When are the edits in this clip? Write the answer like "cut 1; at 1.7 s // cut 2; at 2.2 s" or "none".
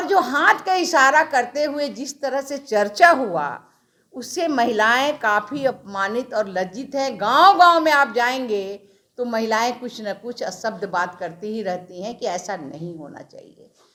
none